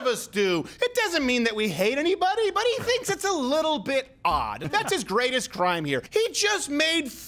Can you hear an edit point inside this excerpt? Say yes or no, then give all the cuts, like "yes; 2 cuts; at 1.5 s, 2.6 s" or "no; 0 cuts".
yes; 2 cuts; at 4.6 s, 6.1 s